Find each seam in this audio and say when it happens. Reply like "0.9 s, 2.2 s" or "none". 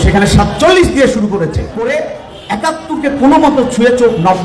1.9 s